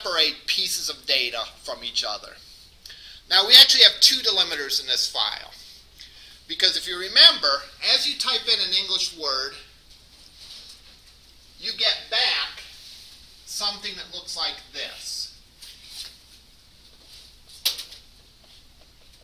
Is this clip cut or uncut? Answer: cut